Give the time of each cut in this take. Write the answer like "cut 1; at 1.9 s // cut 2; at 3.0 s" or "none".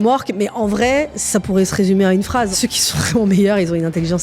cut 1; at 2.5 s